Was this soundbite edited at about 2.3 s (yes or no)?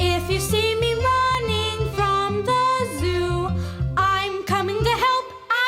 yes